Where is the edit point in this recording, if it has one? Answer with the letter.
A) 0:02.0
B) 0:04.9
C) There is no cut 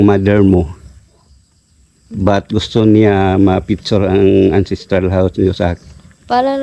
C